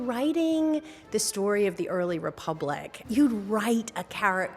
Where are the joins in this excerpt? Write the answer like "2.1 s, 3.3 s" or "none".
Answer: 2.9 s

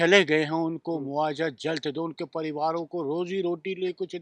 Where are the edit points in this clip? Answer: none

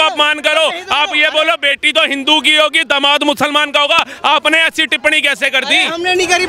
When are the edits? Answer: none

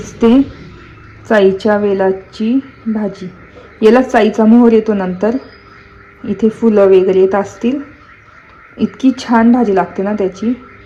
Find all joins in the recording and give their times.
none

